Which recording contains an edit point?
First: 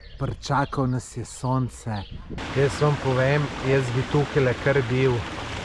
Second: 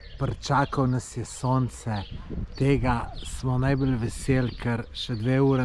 first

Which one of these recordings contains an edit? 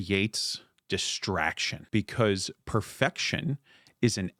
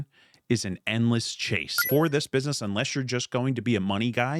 second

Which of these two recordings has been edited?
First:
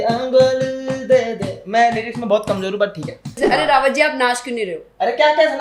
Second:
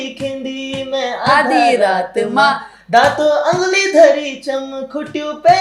first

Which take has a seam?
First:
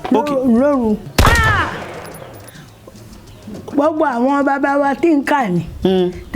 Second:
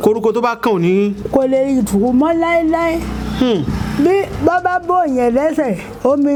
first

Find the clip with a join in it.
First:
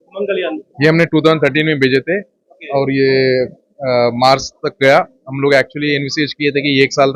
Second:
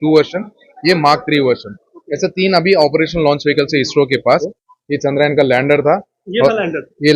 second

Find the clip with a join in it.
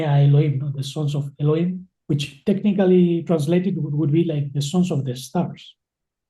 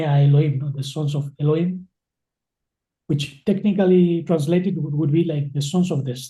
first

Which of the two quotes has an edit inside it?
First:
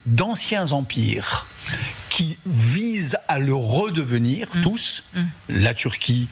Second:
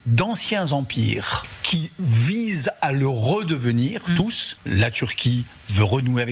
second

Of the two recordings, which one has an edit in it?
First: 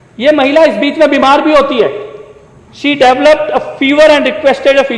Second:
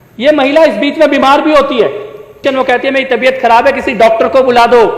second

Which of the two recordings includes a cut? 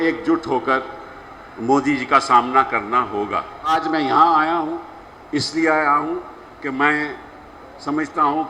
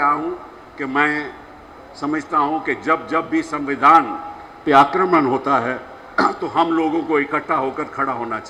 first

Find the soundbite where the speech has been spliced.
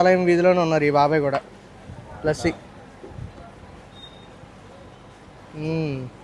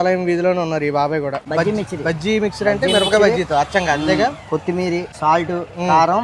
second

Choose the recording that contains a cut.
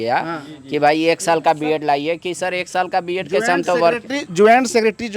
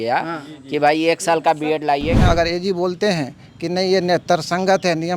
second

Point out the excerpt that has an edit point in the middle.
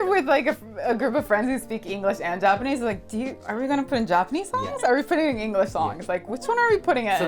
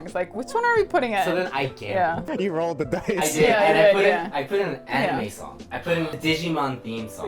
second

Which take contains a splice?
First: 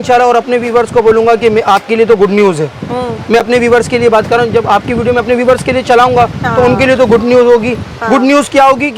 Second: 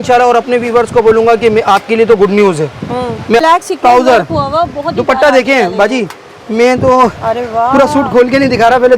second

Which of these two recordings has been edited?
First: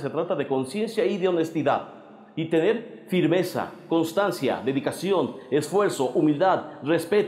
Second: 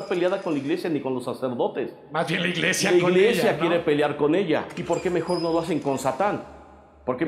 second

